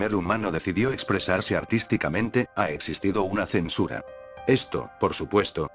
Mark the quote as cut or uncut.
uncut